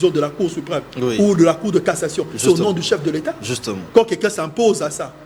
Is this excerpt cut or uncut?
uncut